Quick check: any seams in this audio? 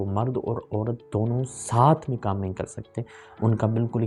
no; 0 cuts

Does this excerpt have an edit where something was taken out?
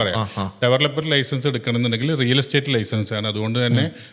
no; 0 cuts

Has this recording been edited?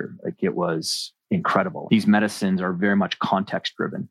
yes; 1 cut; at 1.8 s

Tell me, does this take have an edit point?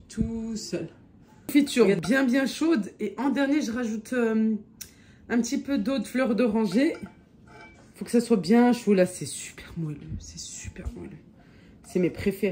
yes; 1 cut; at 1.5 s

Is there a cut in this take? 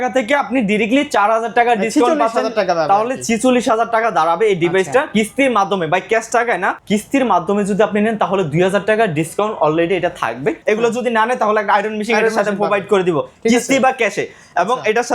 yes; 2 cuts; at 6.8 s, 10.6 s

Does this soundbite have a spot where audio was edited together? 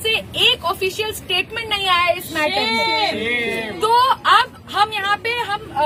no; 0 cuts

